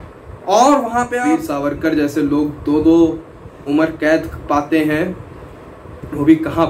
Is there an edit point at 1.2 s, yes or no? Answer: yes